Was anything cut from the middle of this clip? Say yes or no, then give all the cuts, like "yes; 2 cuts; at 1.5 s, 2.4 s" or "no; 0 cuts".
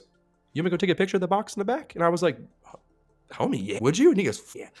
yes; 1 cut; at 3.8 s